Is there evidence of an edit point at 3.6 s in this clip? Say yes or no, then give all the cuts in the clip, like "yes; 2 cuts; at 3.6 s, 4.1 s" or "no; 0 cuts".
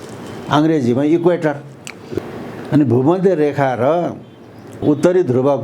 no; 1 cut; at 2.2 s